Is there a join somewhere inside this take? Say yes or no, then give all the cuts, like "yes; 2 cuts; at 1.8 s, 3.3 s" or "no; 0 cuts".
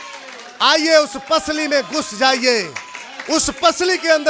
no; 0 cuts